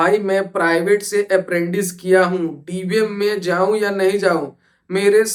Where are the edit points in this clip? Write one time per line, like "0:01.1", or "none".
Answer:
none